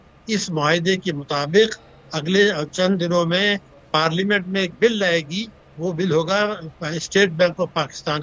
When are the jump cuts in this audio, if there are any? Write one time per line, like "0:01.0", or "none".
none